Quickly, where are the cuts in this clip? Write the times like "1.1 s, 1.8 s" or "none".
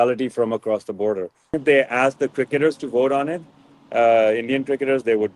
1.6 s